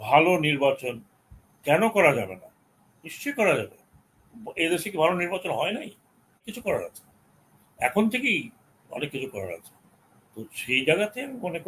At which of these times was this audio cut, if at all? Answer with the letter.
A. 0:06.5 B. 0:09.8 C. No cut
A